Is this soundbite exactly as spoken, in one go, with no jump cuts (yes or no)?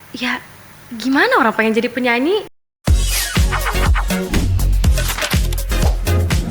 no